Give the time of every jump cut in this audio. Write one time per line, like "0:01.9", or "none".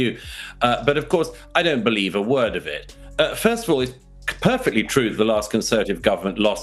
none